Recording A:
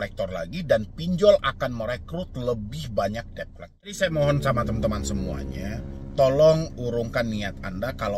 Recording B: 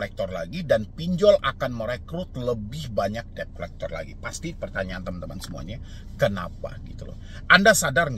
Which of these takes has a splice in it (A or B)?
A